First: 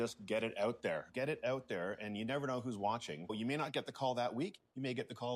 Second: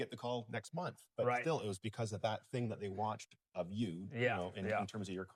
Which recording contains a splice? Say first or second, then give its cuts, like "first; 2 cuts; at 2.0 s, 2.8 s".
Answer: first; 2 cuts; at 1.1 s, 3.3 s